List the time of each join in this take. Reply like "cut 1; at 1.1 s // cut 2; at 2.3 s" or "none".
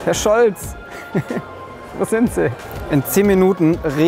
cut 1; at 2.7 s